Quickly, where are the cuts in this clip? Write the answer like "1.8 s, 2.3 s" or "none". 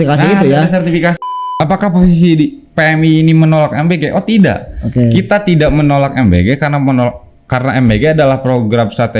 1.1 s